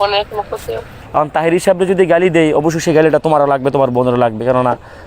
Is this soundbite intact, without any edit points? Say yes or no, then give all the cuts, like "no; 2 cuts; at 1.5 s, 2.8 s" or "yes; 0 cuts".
no; 1 cut; at 1.0 s